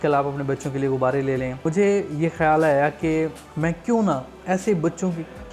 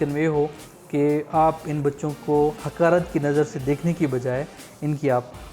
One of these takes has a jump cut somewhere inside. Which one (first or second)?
first